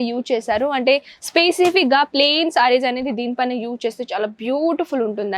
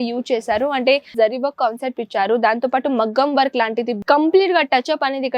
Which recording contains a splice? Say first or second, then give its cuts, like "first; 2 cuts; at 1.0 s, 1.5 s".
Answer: second; 2 cuts; at 1.1 s, 3.9 s